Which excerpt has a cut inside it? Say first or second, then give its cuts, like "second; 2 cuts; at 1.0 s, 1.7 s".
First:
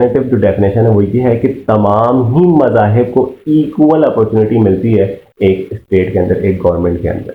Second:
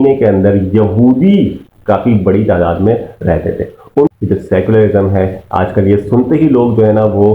second; 1 cut; at 4.1 s